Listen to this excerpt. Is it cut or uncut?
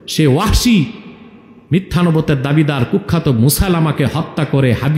uncut